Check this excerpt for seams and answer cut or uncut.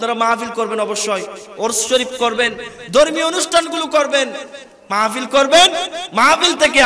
uncut